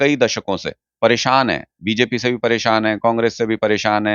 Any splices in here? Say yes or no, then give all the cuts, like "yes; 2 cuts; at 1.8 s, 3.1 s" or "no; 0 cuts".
no; 0 cuts